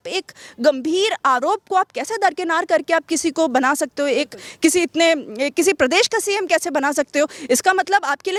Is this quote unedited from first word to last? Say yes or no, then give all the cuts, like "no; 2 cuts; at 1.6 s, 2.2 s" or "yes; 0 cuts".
yes; 0 cuts